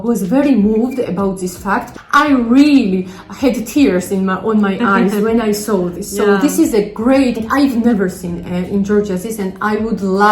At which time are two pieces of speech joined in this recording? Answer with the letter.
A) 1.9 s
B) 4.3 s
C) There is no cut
A